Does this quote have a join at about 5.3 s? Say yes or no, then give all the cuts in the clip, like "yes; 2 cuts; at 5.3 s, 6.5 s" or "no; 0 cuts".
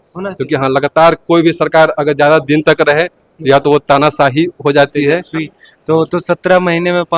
yes; 1 cut; at 5.3 s